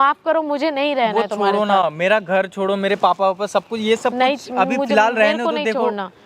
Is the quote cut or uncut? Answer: uncut